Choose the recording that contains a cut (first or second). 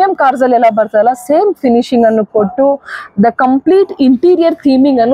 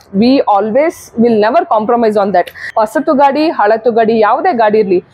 second